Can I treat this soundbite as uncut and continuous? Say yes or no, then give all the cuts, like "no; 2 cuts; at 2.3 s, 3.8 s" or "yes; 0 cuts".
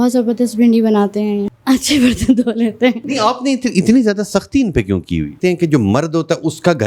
no; 3 cuts; at 1.5 s, 3.0 s, 5.4 s